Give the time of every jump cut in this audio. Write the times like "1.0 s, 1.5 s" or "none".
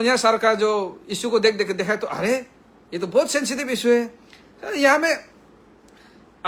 none